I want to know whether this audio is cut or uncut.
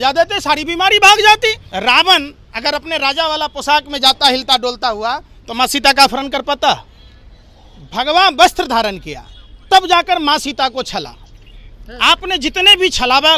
cut